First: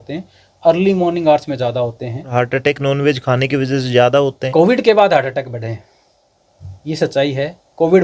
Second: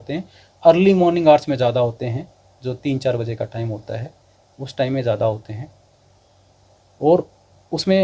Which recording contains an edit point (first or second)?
first